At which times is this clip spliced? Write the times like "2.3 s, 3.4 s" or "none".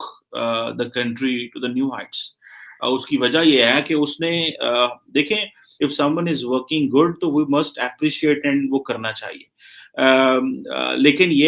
5.6 s